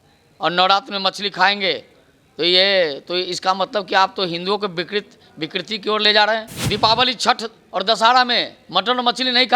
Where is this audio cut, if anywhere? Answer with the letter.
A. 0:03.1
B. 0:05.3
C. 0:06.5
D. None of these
C